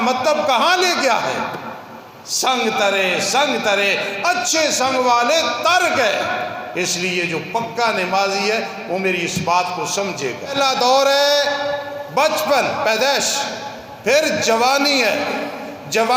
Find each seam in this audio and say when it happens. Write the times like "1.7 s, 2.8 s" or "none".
10.5 s